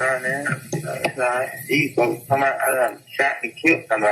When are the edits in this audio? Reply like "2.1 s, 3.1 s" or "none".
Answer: 0.9 s